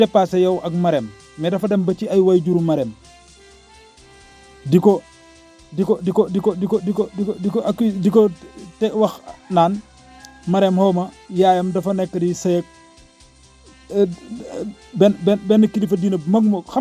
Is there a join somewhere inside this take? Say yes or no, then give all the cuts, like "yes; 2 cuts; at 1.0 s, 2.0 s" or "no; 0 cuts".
yes; 2 cuts; at 3.0 s, 4.4 s